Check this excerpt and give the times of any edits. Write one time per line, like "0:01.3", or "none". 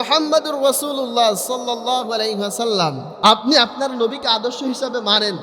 0:03.1